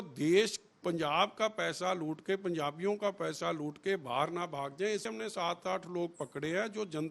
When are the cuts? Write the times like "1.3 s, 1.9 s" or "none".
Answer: 5.1 s